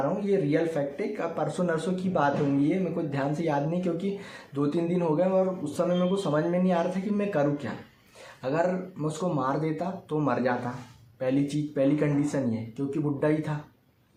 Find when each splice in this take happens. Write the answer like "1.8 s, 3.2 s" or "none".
none